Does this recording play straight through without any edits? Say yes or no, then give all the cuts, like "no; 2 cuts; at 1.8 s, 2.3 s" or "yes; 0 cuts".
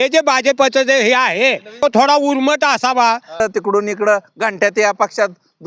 no; 2 cuts; at 1.8 s, 3.4 s